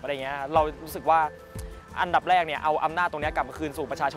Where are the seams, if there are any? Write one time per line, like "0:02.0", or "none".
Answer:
none